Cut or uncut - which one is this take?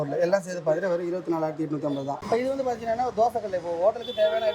cut